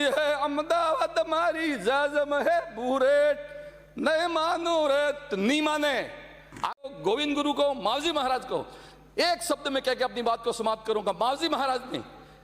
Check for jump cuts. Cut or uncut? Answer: cut